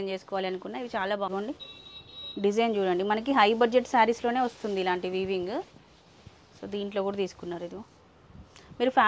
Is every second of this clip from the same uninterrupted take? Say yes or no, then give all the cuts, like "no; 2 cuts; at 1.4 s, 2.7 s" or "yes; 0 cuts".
no; 1 cut; at 1.3 s